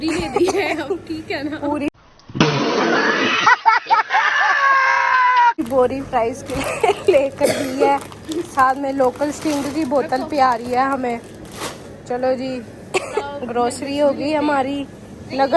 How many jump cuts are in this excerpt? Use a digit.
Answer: 0